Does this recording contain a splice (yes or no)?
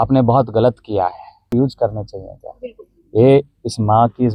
yes